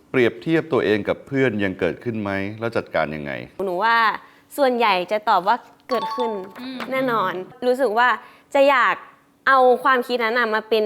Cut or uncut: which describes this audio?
cut